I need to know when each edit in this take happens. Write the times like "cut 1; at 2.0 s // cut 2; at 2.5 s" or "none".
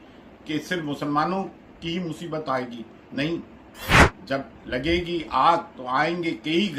none